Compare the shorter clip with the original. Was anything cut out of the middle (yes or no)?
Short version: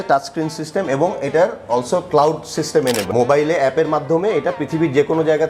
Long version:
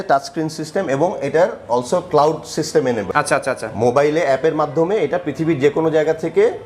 yes